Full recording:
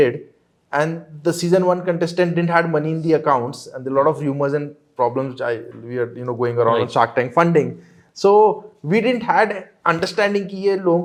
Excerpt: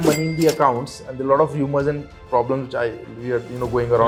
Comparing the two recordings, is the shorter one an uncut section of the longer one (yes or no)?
yes